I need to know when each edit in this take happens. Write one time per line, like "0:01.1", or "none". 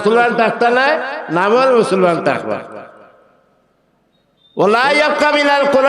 none